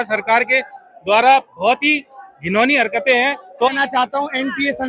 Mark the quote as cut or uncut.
cut